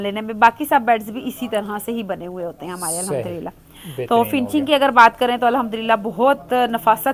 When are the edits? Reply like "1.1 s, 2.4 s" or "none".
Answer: none

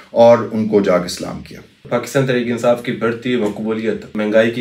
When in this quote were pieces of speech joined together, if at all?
none

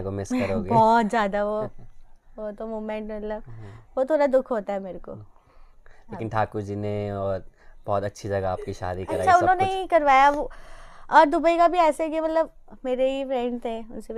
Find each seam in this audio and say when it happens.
none

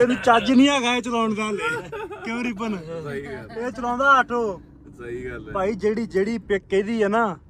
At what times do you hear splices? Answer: none

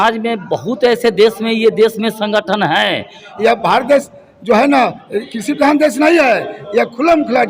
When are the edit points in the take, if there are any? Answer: 3.2 s

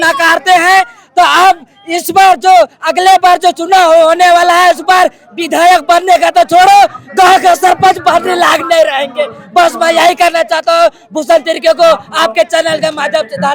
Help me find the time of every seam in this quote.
none

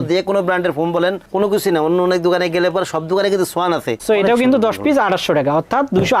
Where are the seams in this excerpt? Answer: 3.9 s

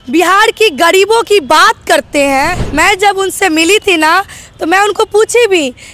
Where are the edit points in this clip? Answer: 2.6 s

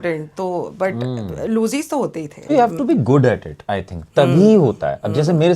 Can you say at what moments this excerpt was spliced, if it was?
2.4 s

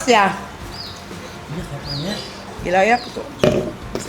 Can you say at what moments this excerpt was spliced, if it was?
2.5 s

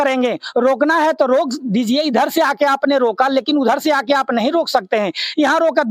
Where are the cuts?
none

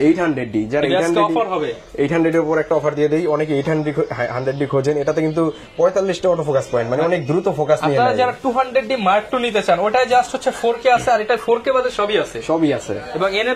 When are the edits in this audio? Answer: none

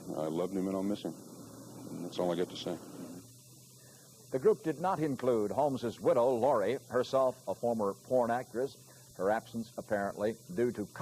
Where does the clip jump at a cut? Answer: none

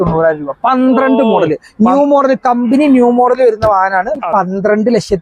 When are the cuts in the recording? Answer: 4.2 s

